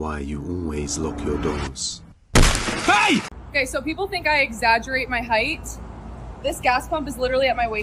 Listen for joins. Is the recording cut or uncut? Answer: cut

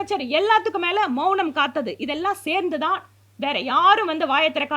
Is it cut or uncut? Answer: uncut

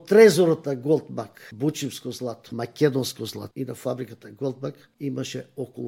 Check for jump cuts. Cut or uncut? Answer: cut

